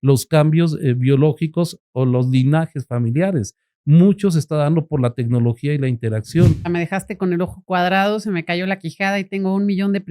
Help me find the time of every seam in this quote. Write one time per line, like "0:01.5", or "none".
0:06.7